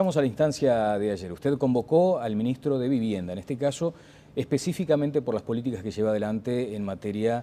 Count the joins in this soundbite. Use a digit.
1